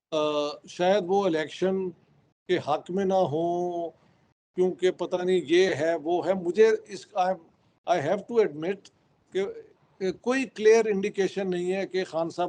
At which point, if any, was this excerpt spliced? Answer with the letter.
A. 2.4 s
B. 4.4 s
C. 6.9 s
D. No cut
D